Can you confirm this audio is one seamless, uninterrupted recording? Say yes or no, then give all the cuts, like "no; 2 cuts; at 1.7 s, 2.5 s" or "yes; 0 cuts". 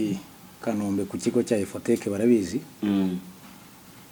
yes; 0 cuts